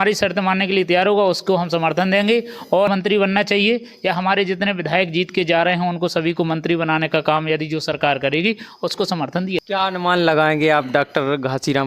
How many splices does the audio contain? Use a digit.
2